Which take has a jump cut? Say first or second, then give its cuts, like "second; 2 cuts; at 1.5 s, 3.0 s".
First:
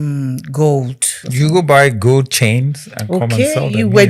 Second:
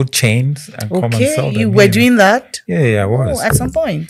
first; 1 cut; at 1.2 s